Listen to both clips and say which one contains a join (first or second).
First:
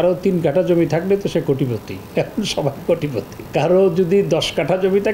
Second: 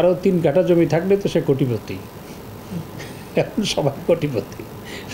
first